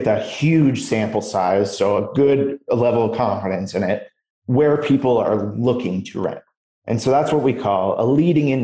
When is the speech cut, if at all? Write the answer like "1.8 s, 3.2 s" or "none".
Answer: none